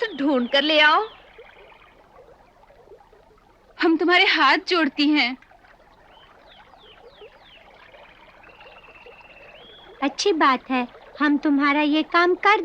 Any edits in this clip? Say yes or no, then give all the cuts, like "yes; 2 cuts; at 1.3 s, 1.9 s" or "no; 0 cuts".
no; 0 cuts